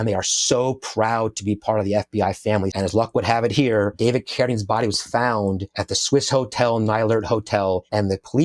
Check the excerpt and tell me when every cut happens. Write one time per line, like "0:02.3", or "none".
0:02.7